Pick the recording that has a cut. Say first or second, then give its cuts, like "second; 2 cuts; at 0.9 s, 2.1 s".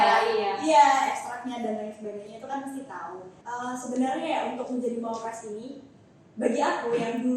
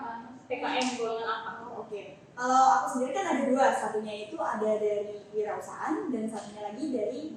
first; 1 cut; at 3.3 s